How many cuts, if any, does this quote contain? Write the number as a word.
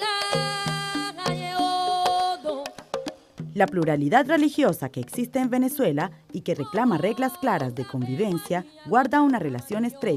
one